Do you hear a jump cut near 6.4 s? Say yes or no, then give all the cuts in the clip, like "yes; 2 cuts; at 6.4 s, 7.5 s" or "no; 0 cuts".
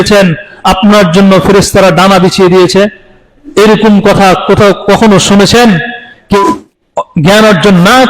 yes; 1 cut; at 6.4 s